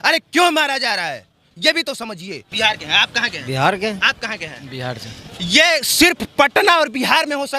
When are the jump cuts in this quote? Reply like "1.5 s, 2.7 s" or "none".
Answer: 2.4 s